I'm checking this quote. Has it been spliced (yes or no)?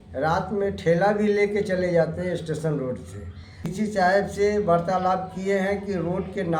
yes